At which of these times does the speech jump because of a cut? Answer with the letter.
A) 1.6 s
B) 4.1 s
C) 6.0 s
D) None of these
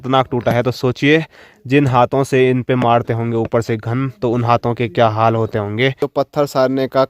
C